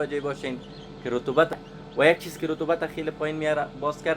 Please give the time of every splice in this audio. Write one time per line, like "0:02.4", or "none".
0:01.5